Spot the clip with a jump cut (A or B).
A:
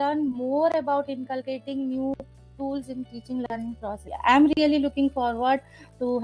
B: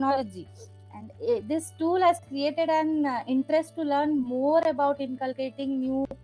A